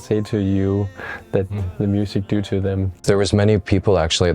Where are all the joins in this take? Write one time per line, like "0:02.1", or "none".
0:03.0

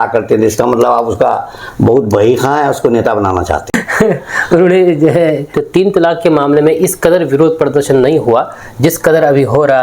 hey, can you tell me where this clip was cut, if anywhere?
0:05.5

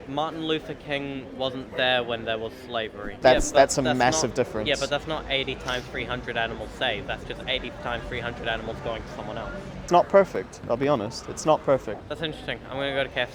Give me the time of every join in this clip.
0:03.0
0:09.9
0:12.1

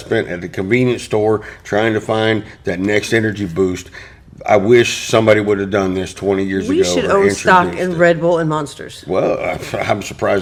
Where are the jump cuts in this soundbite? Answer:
none

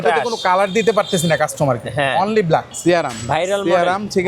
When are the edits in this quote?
0:02.7

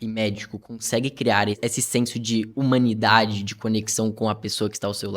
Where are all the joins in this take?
0:01.6

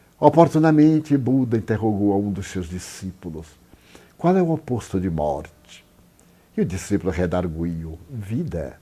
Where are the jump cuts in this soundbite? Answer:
0:00.9

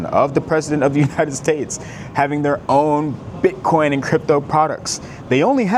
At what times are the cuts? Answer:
none

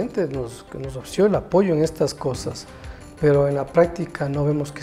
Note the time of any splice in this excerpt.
none

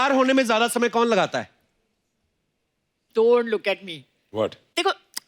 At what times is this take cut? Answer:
none

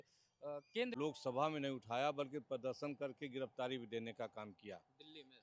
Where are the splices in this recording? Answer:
0:00.9

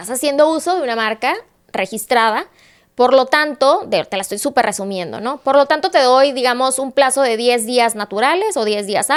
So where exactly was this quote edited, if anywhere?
none

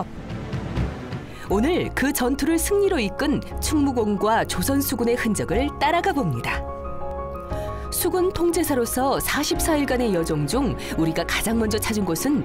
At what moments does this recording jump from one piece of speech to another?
0:03.2

